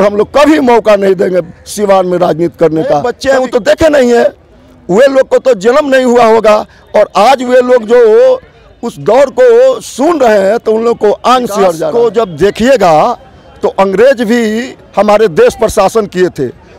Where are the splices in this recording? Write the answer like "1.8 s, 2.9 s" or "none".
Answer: 3.1 s, 11.8 s